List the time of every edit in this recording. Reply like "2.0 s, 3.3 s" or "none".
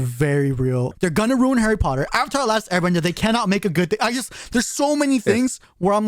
0.9 s